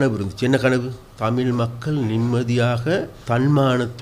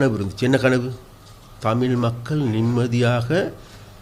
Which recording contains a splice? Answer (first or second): first